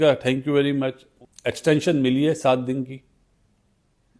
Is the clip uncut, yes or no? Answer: no